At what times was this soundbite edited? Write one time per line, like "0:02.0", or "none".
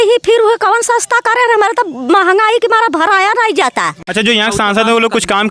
0:04.0